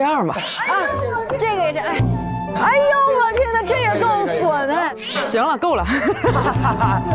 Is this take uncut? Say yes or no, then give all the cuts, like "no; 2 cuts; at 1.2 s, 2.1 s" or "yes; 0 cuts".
yes; 0 cuts